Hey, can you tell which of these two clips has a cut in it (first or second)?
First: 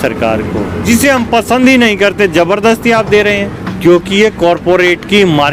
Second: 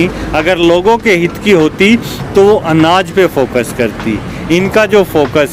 first